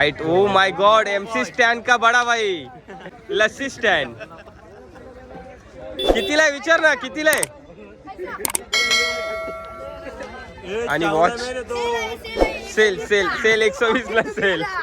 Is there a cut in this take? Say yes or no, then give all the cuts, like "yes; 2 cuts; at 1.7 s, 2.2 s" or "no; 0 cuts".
yes; 1 cut; at 3.1 s